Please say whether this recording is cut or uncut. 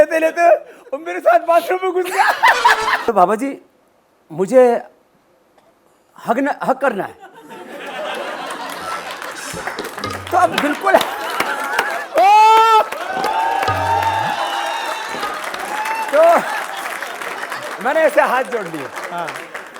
cut